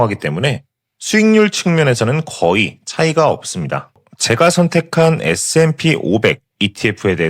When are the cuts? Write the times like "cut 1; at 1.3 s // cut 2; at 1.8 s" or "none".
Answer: cut 1; at 4.1 s

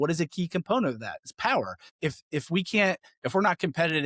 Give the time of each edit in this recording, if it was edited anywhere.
cut 1; at 1.8 s

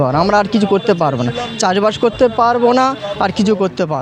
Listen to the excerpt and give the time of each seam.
none

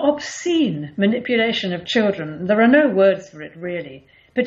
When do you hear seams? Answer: none

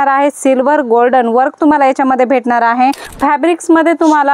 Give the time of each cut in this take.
cut 1; at 3.1 s

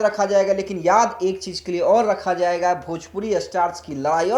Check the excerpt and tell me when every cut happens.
none

